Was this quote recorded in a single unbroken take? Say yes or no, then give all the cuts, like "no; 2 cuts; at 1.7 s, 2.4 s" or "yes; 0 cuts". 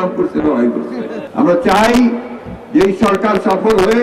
no; 1 cut; at 1.2 s